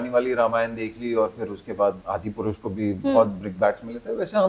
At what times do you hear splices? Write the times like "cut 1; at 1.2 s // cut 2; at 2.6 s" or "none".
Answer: cut 1; at 2.0 s